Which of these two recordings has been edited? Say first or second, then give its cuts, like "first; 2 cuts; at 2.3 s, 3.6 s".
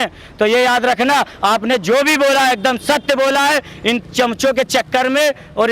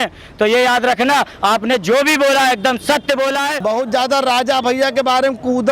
second; 1 cut; at 3.6 s